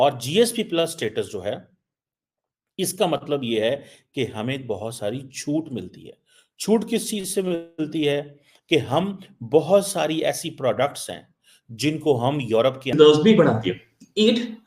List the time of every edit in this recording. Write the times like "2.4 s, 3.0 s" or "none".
12.9 s